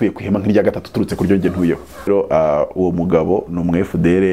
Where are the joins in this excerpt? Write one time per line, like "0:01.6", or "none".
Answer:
0:02.1

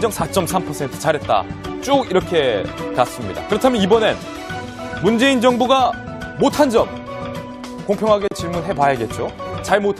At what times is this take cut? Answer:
none

